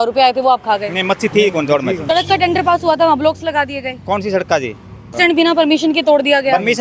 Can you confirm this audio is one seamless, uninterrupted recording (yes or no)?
no